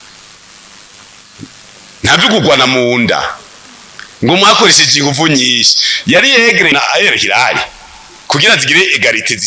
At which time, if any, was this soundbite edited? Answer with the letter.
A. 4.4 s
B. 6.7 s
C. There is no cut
B